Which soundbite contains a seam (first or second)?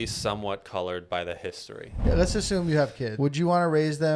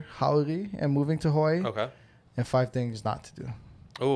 first